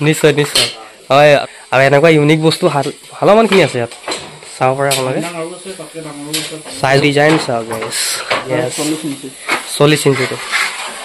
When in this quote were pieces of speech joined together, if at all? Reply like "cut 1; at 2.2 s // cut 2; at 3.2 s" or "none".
cut 1; at 1.5 s // cut 2; at 7.0 s // cut 3; at 8.5 s